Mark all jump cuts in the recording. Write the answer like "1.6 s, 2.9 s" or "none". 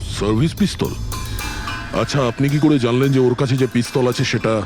none